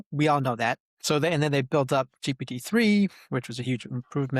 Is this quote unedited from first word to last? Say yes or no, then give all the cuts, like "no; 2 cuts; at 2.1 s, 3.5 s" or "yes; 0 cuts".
no; 1 cut; at 0.9 s